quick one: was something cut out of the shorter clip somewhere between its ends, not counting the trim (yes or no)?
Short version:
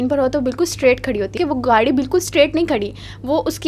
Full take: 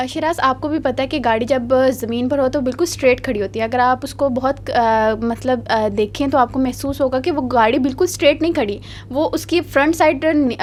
yes